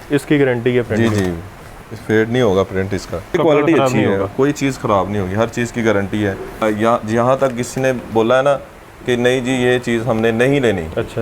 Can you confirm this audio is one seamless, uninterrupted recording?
no; 2 cuts; at 3.4 s, 6.6 s

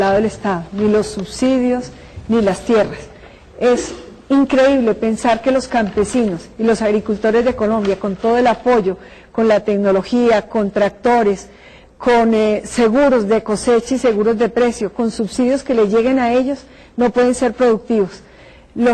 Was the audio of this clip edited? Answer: yes; 1 cut; at 7.0 s

